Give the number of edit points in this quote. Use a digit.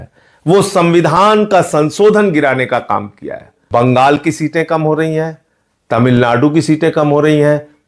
1